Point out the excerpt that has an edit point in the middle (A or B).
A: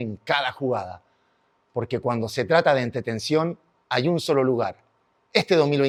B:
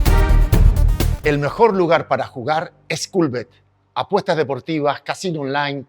B